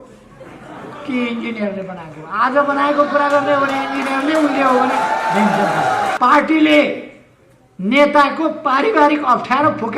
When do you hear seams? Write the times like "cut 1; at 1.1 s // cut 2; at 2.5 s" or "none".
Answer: cut 1; at 6.2 s